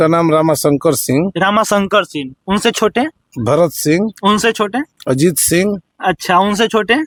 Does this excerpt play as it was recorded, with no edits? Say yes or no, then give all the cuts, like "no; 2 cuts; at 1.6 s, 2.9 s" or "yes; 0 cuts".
yes; 0 cuts